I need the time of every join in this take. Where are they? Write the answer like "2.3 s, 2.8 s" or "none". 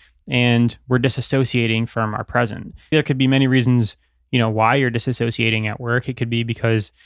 2.9 s